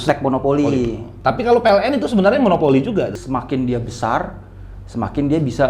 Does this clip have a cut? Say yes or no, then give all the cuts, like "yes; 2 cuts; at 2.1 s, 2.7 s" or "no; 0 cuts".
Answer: yes; 1 cut; at 3.1 s